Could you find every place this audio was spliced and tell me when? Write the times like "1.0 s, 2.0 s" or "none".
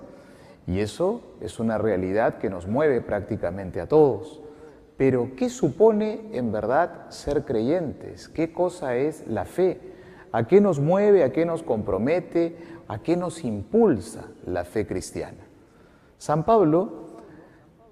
none